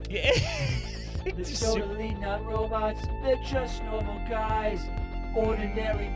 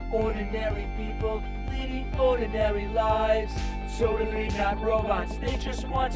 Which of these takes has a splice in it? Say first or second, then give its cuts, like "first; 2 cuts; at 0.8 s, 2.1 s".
first; 1 cut; at 1.4 s